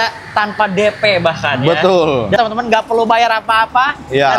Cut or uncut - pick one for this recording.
cut